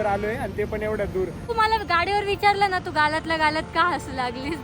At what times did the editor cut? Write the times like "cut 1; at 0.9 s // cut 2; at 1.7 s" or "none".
cut 1; at 1.5 s